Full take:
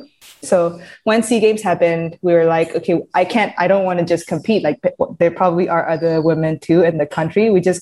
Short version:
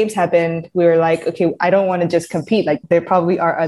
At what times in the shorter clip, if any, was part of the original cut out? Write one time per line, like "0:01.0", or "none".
0:01.6
0:02.8